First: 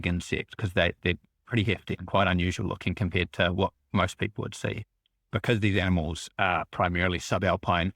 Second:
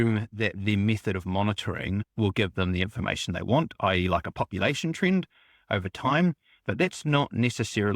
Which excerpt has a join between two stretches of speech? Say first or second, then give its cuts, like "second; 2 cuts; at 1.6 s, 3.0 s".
first; 1 cut; at 4.8 s